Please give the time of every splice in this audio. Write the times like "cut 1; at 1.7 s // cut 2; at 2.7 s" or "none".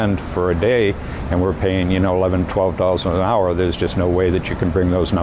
none